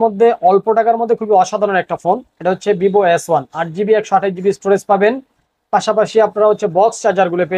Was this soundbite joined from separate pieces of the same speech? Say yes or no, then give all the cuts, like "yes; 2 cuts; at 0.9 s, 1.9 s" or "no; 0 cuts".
no; 0 cuts